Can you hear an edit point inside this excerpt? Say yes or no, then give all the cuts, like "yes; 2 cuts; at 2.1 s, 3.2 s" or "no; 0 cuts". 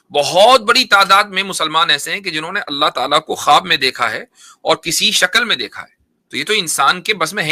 no; 0 cuts